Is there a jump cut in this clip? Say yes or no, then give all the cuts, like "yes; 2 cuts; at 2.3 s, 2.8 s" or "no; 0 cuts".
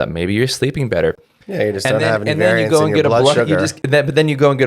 no; 0 cuts